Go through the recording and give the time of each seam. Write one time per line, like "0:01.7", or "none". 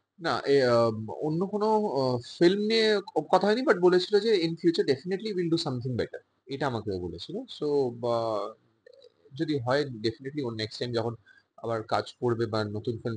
none